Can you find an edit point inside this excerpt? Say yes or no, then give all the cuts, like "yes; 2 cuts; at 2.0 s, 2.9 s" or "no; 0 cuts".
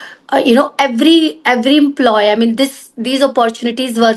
no; 0 cuts